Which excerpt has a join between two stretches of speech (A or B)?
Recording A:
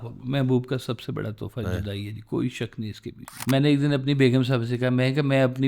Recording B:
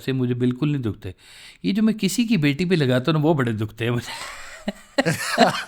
A